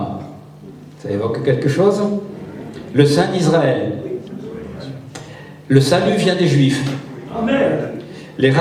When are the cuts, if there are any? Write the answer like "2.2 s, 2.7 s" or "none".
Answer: none

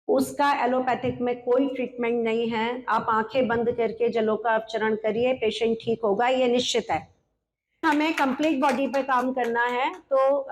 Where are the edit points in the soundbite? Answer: 7.8 s

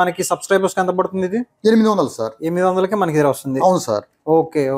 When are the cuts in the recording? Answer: none

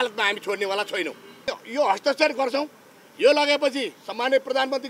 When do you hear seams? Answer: 1.6 s

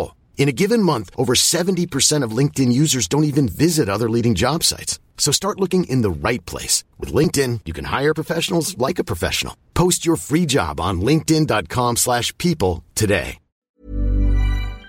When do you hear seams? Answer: 13.7 s

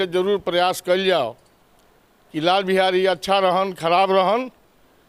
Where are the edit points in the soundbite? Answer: none

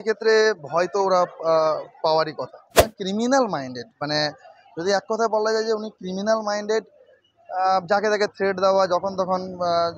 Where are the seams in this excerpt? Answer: 2.7 s

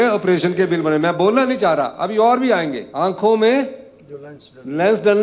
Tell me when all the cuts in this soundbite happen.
2.8 s

